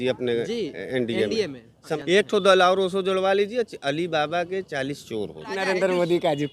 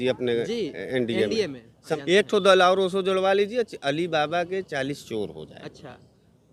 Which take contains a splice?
first; 1 cut; at 5.6 s

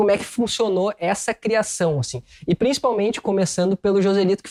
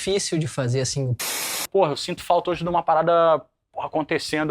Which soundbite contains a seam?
second; 1 cut; at 1.6 s

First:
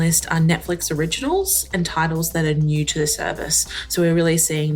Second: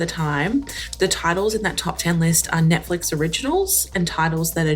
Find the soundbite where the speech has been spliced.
second; 1 cut; at 1.0 s

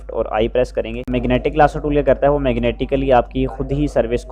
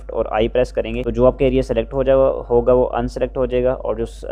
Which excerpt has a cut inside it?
first; 1 cut; at 1.0 s

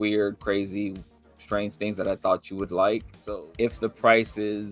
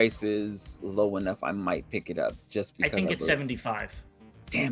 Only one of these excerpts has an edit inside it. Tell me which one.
first; 1 cut; at 3.1 s

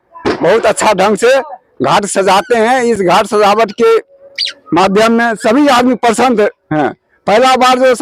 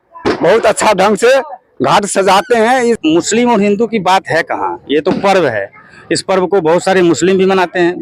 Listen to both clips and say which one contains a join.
second; 1 cut; at 3.0 s

